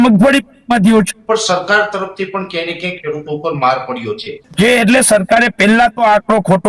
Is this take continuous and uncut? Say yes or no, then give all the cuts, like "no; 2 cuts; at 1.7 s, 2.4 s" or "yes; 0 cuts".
no; 2 cuts; at 1.2 s, 4.4 s